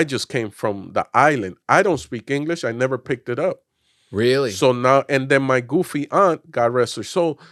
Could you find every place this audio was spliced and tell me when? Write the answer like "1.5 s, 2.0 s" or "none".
none